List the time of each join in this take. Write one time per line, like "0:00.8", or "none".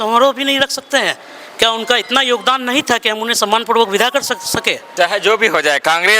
0:04.9